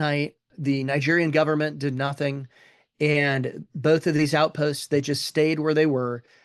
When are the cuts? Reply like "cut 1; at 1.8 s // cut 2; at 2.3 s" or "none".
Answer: none